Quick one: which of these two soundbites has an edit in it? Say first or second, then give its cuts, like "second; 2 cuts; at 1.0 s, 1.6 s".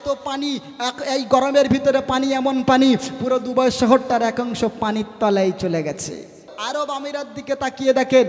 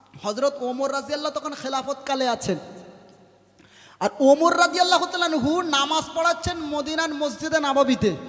first; 1 cut; at 6.5 s